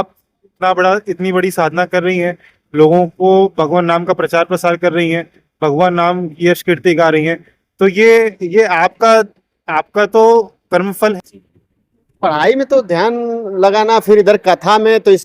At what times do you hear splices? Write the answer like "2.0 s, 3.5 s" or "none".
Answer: 11.2 s